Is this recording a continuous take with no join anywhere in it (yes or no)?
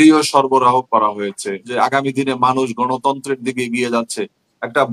no